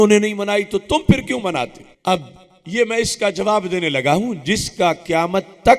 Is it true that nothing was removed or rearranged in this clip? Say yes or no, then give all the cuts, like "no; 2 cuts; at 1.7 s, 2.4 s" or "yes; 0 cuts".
no; 1 cut; at 1.9 s